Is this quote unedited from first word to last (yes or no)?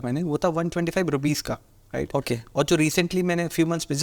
yes